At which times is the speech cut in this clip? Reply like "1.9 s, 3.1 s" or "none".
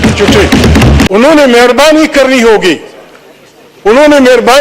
1.1 s